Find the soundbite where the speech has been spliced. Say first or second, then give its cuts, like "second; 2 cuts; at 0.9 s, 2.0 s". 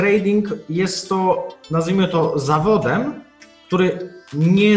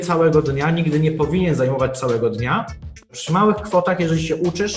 second; 1 cut; at 2.9 s